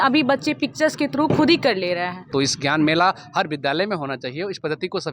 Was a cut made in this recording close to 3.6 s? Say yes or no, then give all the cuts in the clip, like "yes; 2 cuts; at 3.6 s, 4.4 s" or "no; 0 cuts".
no; 1 cut; at 2.2 s